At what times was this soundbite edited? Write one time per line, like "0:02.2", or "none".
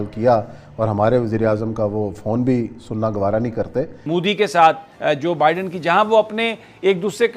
0:04.0